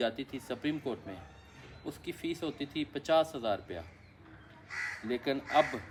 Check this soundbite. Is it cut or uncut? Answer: uncut